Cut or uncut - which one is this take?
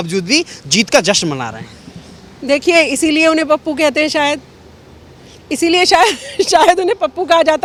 uncut